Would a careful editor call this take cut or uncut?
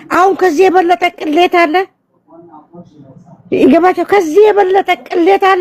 uncut